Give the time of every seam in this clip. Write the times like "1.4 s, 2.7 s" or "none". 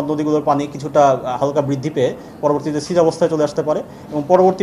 none

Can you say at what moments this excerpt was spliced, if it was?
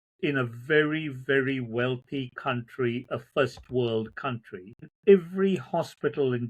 4.9 s

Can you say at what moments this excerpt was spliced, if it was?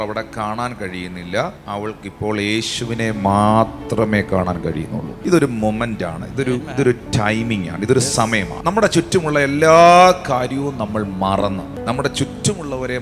1.6 s, 8.5 s, 11.8 s

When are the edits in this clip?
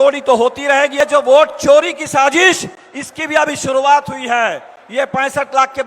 1.0 s

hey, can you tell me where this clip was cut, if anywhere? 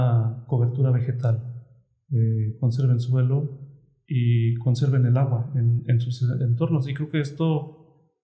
none

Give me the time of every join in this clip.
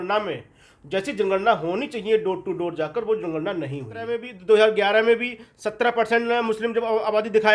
4.3 s

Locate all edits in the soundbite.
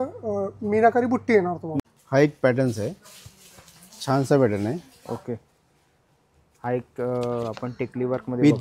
1.7 s

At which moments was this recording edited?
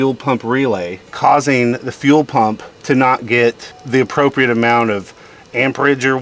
1.0 s, 2.7 s, 3.7 s

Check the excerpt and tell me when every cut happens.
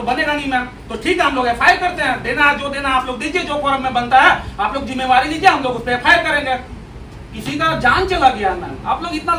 none

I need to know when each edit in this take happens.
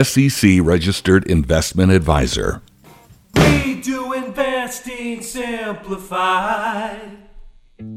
3.2 s

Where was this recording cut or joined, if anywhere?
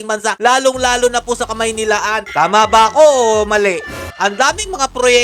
2.2 s, 4.1 s

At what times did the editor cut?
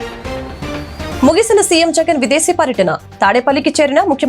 1.2 s

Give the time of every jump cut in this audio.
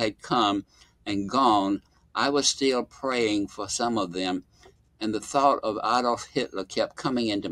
none

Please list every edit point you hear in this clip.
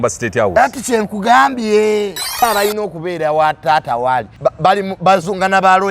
2.4 s, 4.3 s

